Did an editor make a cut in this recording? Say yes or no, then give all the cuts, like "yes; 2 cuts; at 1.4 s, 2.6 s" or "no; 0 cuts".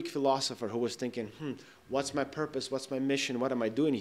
no; 0 cuts